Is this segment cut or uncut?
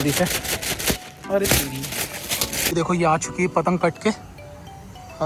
cut